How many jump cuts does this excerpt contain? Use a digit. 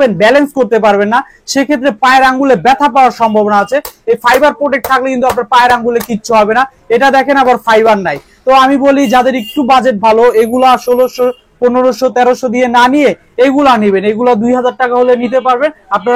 0